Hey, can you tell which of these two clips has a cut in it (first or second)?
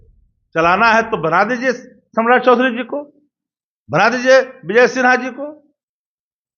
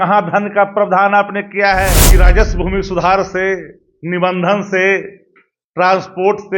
second